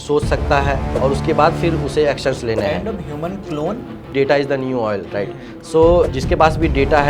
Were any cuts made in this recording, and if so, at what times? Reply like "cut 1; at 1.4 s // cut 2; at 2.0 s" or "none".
cut 1; at 0.9 s // cut 2; at 4.1 s